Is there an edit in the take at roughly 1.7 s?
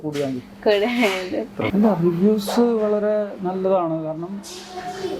yes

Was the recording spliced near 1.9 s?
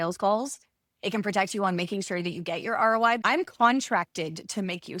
no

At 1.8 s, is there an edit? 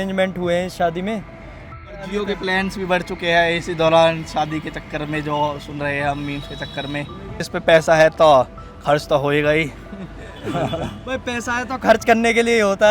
yes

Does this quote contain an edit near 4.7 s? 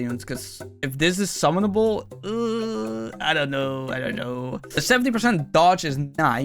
yes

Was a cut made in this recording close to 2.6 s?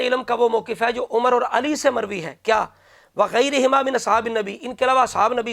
no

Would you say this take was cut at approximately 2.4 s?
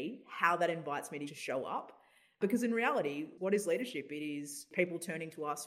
yes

